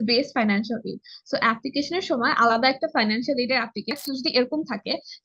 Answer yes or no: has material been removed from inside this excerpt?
yes